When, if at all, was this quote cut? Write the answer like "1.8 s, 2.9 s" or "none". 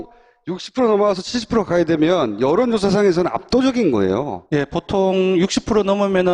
4.1 s